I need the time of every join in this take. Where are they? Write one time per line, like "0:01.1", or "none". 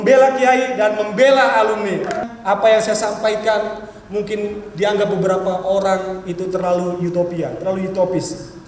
0:02.2